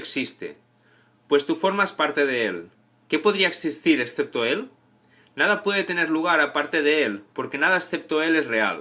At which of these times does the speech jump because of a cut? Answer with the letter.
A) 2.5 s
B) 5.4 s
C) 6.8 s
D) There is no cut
A